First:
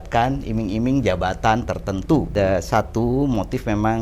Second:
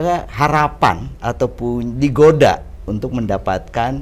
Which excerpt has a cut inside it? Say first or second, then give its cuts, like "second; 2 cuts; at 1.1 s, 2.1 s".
first; 1 cut; at 2.3 s